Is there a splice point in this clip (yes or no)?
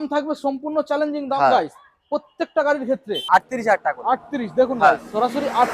yes